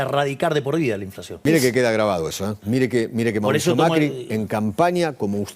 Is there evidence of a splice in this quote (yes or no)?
yes